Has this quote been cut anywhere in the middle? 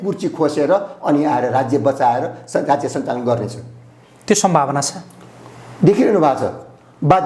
no; 0 cuts

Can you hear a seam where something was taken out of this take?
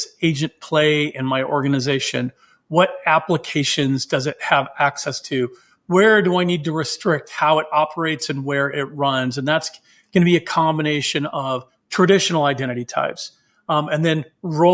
no; 0 cuts

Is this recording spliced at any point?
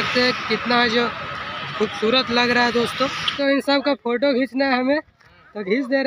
yes; 1 cut; at 3.2 s

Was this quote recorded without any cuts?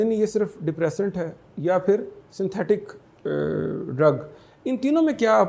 yes; 0 cuts

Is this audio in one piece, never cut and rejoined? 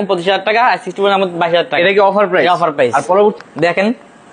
no; 1 cut; at 3.3 s

